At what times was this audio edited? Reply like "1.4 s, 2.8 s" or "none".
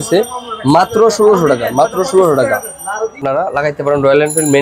3.2 s